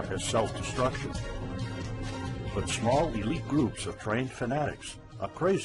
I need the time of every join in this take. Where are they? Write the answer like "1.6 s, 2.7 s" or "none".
none